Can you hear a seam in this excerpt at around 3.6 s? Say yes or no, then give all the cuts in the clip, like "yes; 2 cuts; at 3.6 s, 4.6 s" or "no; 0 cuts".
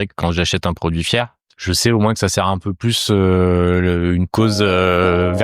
no; 1 cut; at 1.4 s